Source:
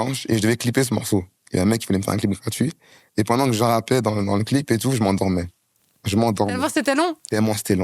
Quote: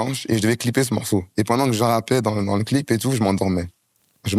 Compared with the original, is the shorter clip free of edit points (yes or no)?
no